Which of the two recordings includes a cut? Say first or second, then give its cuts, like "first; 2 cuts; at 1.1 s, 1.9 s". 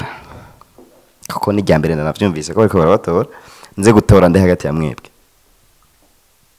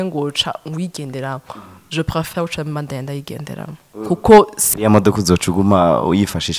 second; 1 cut; at 4.6 s